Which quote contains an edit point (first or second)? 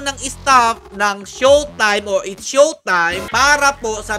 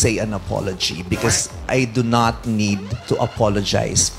second